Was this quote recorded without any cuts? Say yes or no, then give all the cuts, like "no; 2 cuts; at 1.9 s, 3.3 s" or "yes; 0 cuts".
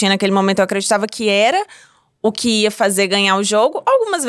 yes; 0 cuts